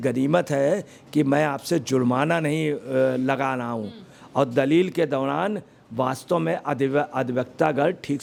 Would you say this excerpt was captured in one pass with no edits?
yes; 0 cuts

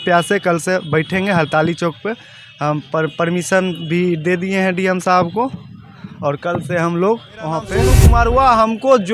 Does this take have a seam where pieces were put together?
yes; 1 cut; at 8.1 s

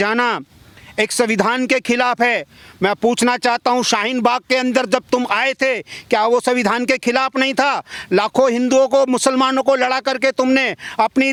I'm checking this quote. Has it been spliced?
no; 0 cuts

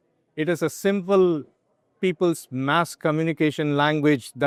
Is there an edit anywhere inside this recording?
no; 0 cuts

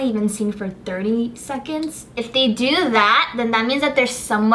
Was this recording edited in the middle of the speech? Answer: yes; 1 cut; at 2.1 s

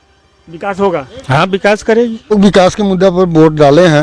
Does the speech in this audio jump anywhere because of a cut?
yes; 1 cut; at 2.3 s

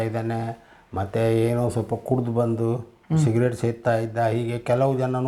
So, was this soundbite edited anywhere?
no; 0 cuts

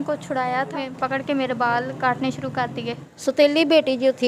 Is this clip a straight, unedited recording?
no; 2 cuts; at 0.9 s, 3.1 s

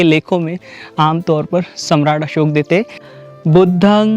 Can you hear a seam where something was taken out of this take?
yes; 1 cut; at 3.0 s

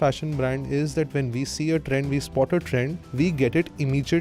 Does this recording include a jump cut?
yes; 1 cut; at 3.0 s

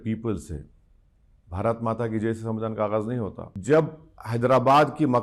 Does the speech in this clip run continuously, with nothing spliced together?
no; 1 cut; at 3.5 s

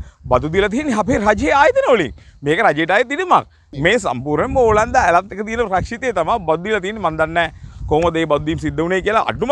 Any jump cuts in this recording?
yes; 1 cut; at 3.6 s

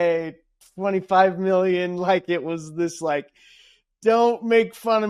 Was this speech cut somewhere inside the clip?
no; 0 cuts

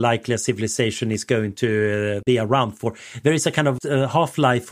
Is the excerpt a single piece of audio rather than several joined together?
no; 2 cuts; at 2.2 s, 3.8 s

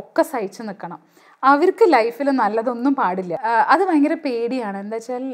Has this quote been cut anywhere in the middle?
yes; 1 cut; at 3.3 s

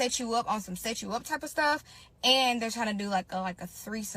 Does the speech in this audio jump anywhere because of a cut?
no; 0 cuts

